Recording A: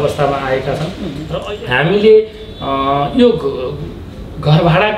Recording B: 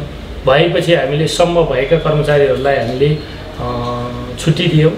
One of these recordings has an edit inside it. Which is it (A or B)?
A